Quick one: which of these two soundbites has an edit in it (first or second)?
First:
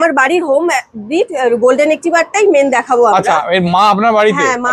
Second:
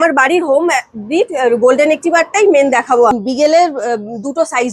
second